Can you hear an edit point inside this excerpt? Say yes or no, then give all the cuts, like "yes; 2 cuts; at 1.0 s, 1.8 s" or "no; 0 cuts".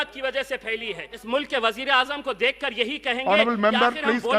yes; 1 cut; at 1.1 s